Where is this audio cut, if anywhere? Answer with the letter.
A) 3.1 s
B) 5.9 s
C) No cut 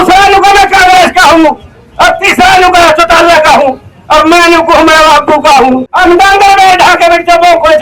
B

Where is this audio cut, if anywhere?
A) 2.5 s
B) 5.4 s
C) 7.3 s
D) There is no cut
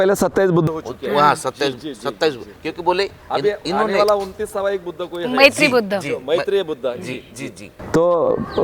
D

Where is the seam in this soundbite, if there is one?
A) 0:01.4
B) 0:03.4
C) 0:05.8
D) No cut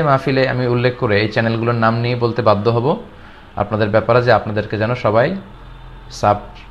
D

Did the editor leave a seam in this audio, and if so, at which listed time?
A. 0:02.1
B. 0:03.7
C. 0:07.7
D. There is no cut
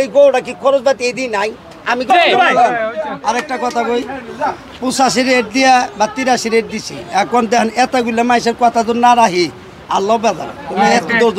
A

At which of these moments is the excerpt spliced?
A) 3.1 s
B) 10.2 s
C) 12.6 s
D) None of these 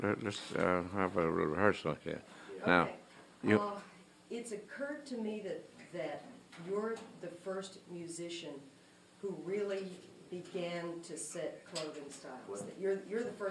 D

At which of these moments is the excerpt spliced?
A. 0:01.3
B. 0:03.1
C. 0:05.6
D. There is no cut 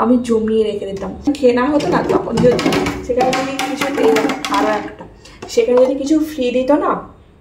A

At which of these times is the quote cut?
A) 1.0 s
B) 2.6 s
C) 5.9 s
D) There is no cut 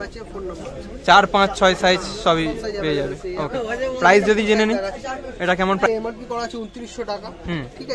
C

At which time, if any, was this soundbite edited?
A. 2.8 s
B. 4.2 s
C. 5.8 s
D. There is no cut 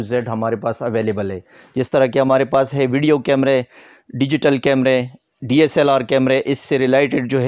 D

